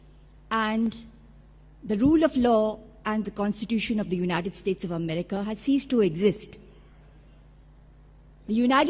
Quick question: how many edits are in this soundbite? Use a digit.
1